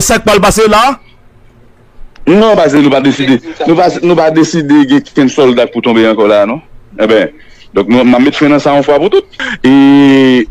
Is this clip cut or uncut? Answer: cut